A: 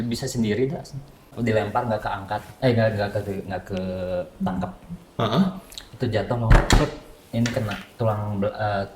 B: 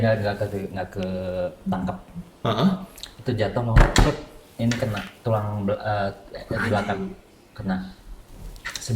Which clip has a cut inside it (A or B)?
A